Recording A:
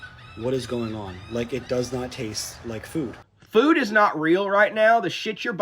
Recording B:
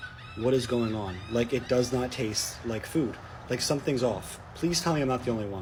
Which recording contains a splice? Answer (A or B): A